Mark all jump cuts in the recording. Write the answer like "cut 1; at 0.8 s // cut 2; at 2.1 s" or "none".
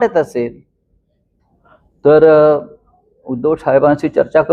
none